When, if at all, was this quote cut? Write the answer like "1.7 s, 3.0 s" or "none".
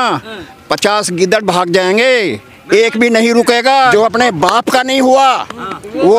3.9 s